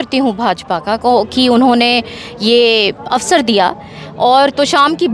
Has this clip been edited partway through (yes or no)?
no